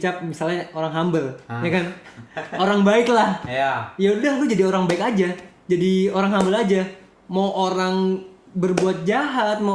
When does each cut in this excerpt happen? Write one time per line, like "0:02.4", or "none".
none